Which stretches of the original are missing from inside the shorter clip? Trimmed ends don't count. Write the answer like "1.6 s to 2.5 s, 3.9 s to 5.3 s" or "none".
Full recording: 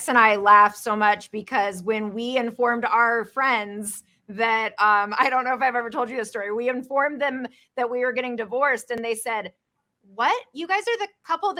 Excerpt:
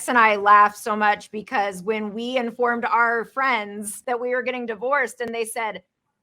3.9 s to 7.6 s